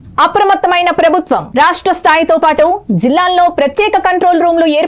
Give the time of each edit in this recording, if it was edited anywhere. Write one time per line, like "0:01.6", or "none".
none